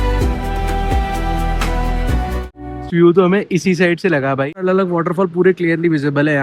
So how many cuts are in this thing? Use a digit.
2